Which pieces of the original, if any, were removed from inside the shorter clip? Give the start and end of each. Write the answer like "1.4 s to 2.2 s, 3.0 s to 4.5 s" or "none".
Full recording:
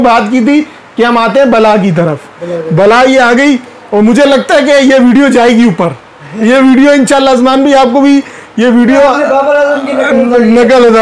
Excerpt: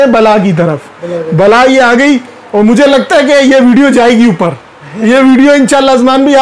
none